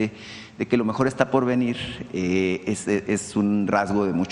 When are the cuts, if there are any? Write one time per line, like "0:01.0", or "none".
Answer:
none